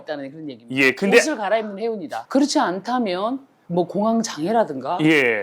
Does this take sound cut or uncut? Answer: cut